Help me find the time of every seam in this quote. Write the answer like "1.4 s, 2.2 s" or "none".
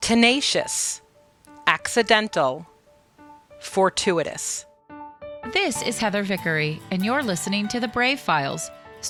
none